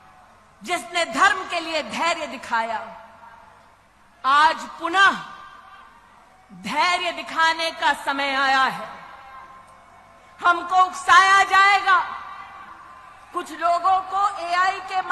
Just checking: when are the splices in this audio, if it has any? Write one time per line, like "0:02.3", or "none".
none